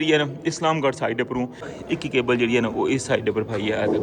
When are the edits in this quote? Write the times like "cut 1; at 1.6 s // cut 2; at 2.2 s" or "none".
cut 1; at 1.7 s